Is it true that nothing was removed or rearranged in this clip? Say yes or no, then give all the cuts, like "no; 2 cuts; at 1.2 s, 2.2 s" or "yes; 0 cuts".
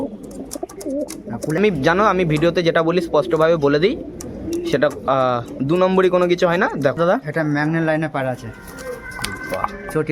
no; 2 cuts; at 1.6 s, 7.0 s